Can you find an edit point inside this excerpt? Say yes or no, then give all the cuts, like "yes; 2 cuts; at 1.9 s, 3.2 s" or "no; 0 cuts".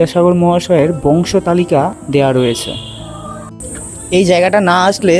yes; 2 cuts; at 2.0 s, 3.6 s